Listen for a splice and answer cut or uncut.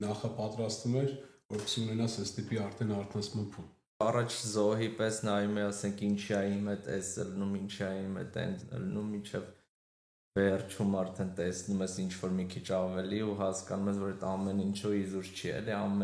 cut